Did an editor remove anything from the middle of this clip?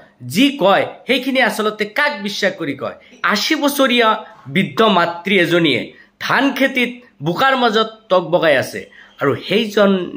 yes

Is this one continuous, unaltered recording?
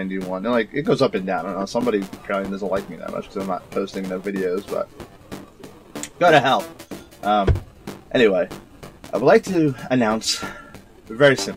yes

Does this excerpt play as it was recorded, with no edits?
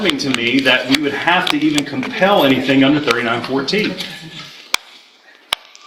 yes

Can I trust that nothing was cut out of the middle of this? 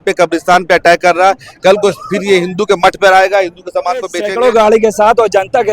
no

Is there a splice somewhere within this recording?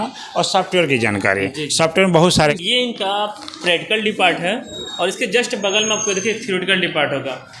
yes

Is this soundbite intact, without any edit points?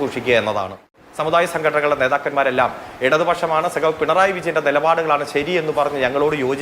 no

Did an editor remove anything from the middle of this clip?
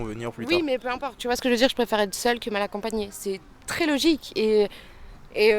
yes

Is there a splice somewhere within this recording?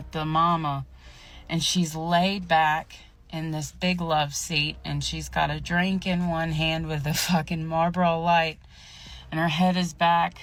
no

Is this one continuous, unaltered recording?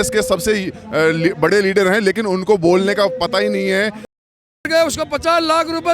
no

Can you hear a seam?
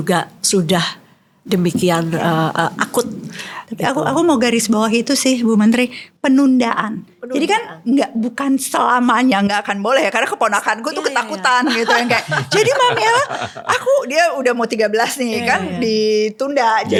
no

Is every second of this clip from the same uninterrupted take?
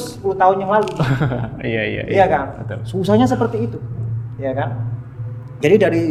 yes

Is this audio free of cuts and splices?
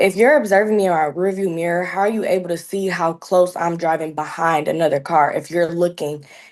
yes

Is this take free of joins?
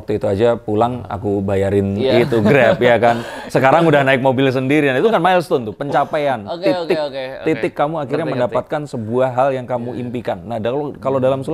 yes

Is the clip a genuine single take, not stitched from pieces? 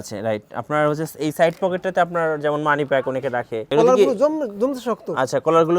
no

